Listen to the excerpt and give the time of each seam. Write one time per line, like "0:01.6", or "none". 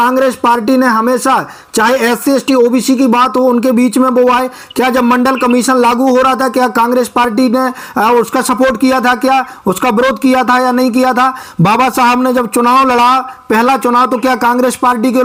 none